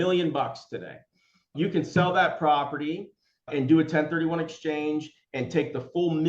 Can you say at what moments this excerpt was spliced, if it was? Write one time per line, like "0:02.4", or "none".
0:03.5